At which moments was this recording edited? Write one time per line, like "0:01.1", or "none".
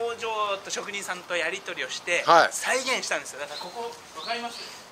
none